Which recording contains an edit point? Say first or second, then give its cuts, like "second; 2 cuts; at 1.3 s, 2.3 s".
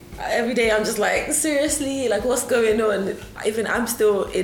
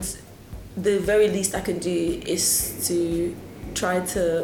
second; 1 cut; at 3.5 s